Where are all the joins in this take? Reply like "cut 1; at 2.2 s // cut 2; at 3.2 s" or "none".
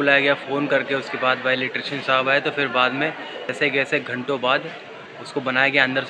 cut 1; at 3.5 s

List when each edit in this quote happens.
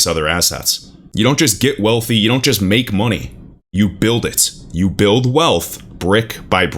cut 1; at 1.0 s

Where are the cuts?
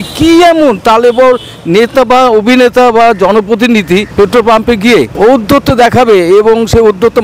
cut 1; at 4.1 s // cut 2; at 5.1 s

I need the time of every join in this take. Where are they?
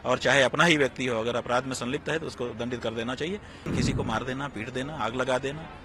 cut 1; at 3.7 s

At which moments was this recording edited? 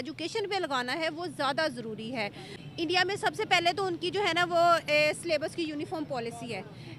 cut 1; at 2.5 s

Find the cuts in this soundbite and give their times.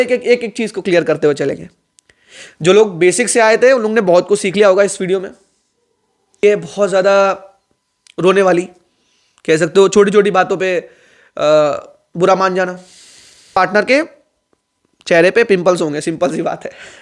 cut 1; at 6.4 s // cut 2; at 13.5 s

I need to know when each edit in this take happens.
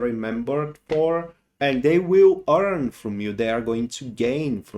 cut 1; at 1.4 s

